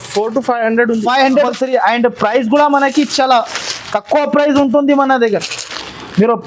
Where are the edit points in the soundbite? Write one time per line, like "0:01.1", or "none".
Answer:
0:01.5